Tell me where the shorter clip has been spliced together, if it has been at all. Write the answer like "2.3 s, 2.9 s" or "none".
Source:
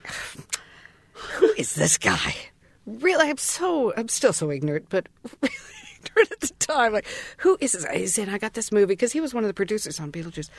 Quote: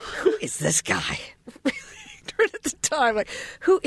1.4 s